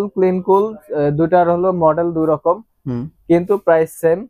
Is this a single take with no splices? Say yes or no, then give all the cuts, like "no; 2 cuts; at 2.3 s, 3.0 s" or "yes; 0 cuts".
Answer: yes; 0 cuts